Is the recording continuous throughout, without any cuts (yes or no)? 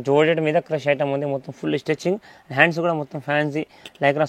yes